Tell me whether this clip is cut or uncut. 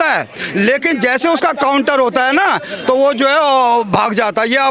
uncut